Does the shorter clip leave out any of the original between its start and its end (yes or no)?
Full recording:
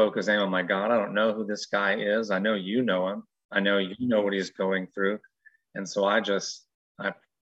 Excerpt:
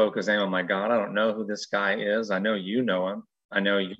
no